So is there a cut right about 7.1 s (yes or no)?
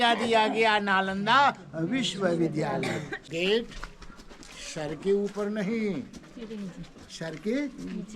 no